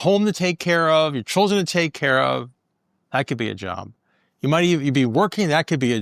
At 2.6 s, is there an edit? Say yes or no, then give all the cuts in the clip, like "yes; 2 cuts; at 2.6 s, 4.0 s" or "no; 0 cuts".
no; 0 cuts